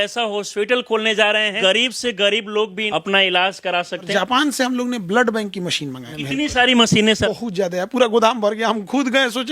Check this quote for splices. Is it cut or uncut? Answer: cut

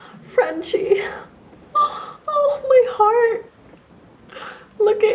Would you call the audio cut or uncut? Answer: uncut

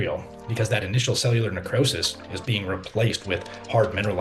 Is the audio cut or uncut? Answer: uncut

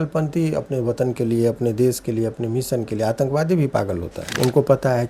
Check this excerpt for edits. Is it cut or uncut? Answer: cut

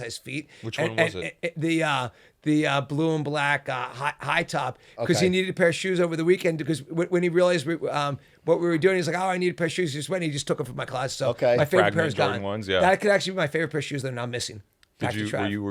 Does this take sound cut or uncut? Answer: uncut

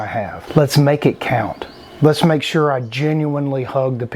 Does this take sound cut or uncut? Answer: uncut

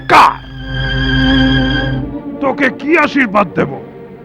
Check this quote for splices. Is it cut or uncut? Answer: cut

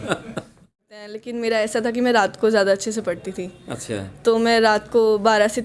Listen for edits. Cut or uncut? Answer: cut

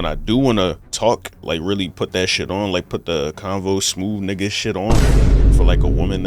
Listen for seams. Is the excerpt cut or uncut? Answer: cut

